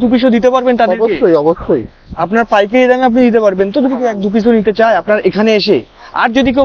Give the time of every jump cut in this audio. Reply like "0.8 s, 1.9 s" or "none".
none